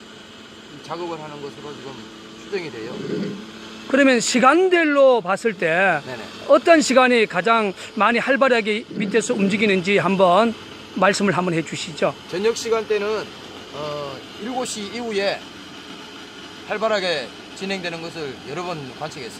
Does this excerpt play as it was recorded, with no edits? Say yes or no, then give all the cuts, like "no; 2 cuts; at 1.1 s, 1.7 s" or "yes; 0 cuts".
no; 1 cut; at 17.5 s